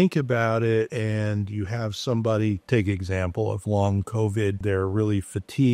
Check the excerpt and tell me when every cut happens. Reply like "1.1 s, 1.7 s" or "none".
0.9 s, 4.6 s